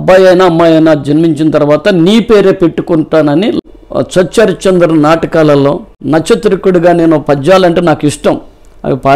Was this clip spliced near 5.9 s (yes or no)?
yes